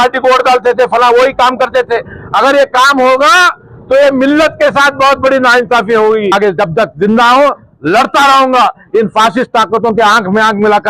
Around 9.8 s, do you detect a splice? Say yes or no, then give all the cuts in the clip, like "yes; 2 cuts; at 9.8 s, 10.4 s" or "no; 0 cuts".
no; 1 cut; at 6.4 s